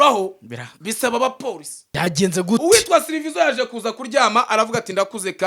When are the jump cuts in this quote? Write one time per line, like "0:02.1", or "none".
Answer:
0:02.0